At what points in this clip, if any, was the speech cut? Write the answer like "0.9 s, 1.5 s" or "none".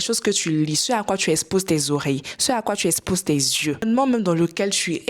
3.8 s